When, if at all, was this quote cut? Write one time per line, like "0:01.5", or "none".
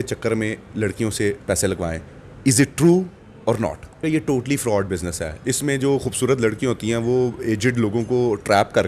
0:04.0

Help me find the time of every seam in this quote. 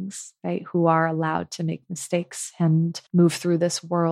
0:03.0

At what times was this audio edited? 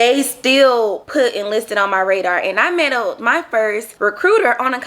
0:01.0
0:03.9

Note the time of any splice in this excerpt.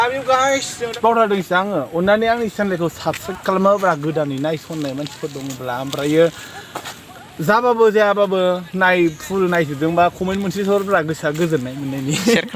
0:00.9

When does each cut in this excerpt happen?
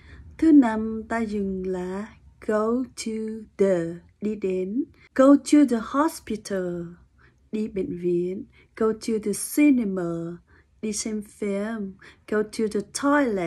0:05.0

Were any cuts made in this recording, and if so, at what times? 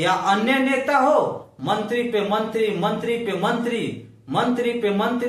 none

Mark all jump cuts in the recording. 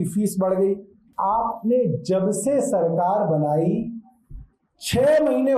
0:01.0

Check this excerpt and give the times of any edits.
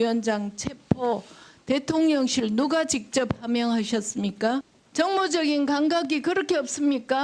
0:04.8

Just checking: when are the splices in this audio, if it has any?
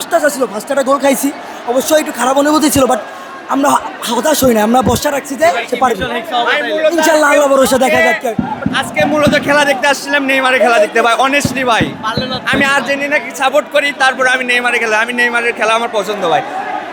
none

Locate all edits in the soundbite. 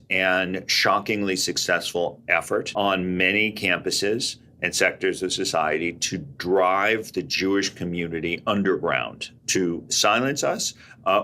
0:02.7

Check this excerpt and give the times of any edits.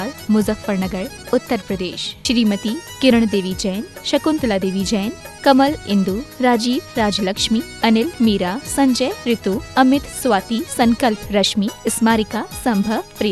0:02.1

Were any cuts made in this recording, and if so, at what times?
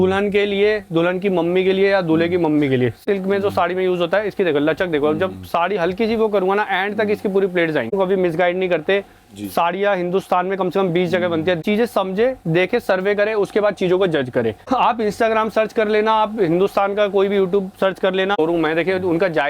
0:03.0
0:07.9
0:11.6
0:14.6
0:18.4

